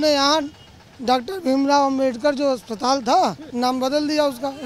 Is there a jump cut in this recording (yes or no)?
yes